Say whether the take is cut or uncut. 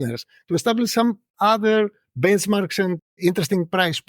cut